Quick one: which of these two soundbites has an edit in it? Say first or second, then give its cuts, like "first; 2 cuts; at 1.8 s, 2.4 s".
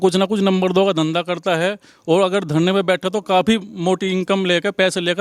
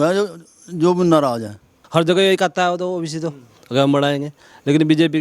second; 1 cut; at 1.7 s